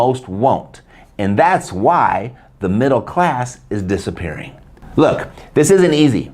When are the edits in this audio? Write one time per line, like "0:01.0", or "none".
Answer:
0:04.5